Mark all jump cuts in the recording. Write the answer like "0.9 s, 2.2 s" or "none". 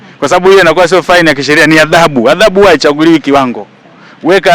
none